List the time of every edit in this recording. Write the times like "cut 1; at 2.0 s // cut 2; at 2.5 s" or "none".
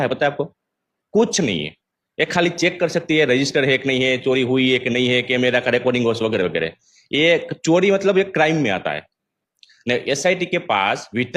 none